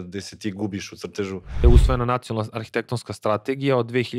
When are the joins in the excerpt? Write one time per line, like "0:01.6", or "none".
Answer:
0:01.6